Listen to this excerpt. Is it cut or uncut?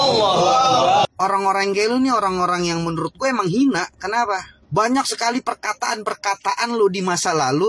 cut